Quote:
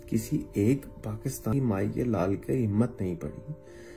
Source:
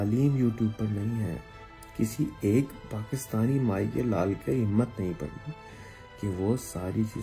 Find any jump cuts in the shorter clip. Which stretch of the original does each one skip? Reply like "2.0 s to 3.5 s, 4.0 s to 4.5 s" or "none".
3.4 s to 3.5 s